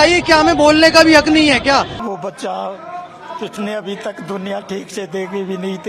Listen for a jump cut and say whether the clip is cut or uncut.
cut